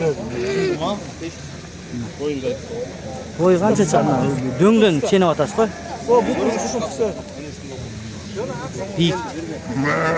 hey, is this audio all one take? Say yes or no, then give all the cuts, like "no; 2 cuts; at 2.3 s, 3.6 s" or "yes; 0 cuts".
yes; 0 cuts